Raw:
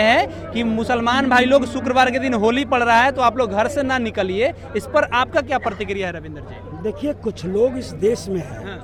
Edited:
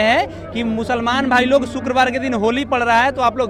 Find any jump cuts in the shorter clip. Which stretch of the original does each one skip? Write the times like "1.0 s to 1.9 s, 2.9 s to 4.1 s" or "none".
none

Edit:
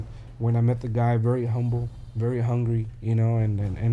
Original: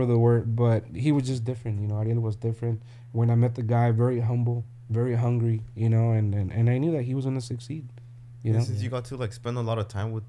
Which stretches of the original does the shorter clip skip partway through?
none

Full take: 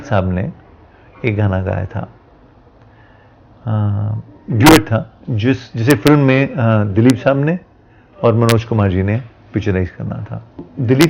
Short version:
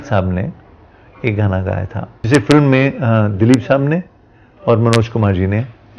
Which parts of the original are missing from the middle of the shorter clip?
2.1 s to 5.7 s

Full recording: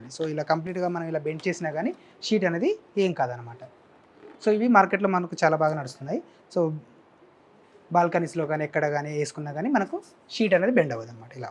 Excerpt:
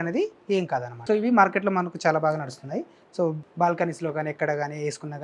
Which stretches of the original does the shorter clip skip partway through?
3.4 s to 4.3 s, 6.8 s to 7.8 s

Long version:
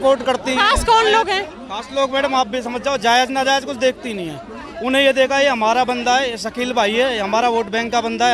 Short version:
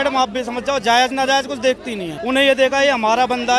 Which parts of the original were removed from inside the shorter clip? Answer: 4.3 s to 4.7 s

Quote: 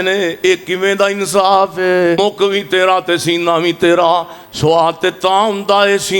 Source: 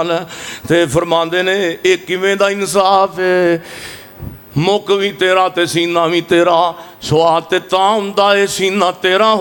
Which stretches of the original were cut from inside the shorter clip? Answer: 3.6 s to 4.6 s

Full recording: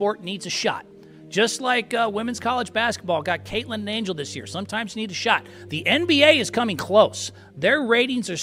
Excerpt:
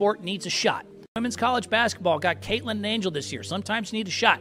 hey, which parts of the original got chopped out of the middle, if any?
1.2 s to 2.2 s

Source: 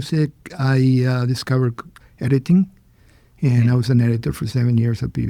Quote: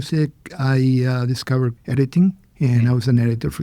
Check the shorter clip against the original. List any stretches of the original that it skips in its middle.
1.8 s to 2.1 s, 2.8 s to 3.3 s

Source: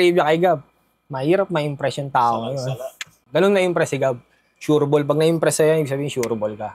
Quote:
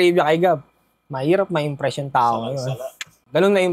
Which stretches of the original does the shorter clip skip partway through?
none

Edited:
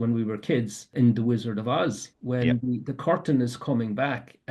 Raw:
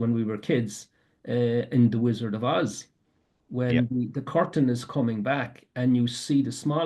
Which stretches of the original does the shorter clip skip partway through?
0.9 s to 1.7 s, 2.9 s to 3.4 s

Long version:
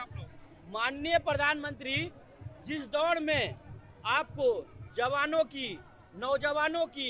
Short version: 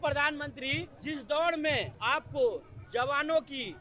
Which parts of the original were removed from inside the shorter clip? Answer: 2.1 s to 2.5 s, 3.6 s to 4.0 s

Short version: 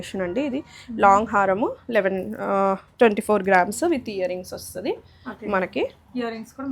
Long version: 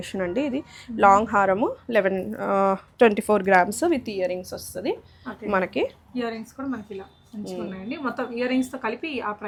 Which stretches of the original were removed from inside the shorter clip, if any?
none

